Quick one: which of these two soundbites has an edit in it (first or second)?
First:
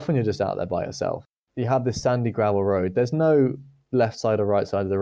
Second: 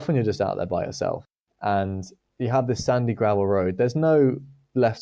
first